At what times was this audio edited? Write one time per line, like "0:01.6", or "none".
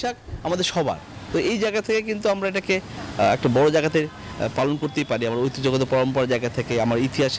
none